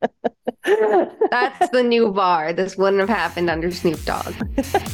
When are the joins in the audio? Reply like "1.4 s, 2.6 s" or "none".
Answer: none